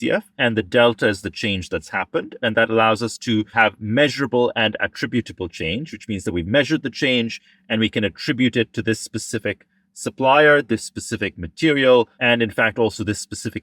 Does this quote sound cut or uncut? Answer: cut